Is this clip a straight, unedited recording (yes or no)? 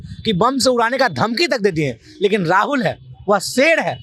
yes